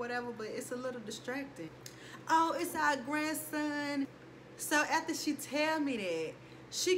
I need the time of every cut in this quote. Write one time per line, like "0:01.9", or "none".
0:01.7
0:04.2